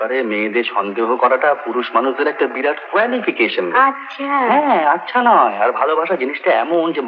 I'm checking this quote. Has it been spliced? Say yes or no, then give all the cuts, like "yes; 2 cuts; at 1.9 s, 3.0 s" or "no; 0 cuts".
no; 0 cuts